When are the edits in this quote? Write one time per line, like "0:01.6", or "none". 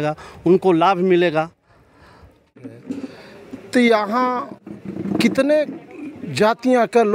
0:02.8